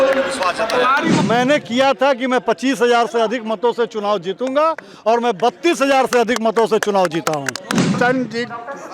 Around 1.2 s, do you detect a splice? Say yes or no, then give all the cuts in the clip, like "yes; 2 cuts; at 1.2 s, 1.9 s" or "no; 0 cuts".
yes; 2 cuts; at 1.2 s, 8.0 s